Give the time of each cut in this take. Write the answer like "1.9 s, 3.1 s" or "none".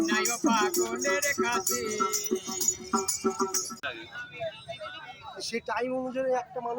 3.9 s